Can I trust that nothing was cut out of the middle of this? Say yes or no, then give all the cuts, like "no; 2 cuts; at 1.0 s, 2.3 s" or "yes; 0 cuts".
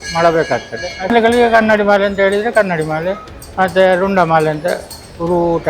no; 1 cut; at 1.1 s